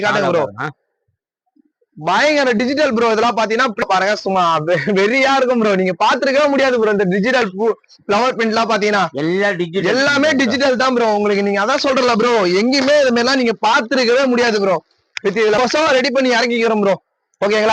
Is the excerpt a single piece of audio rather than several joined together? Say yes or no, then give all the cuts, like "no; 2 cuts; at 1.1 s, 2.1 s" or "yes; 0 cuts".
no; 2 cuts; at 3.8 s, 15.6 s